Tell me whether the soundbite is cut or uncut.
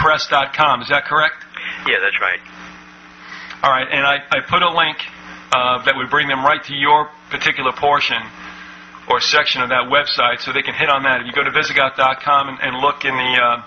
cut